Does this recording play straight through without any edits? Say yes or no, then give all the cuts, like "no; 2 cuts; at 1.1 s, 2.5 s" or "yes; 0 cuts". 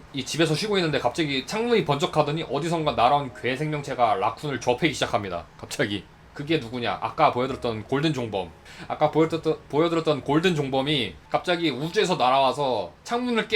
no; 1 cut; at 6.1 s